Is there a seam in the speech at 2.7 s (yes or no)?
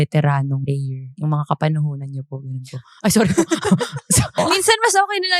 no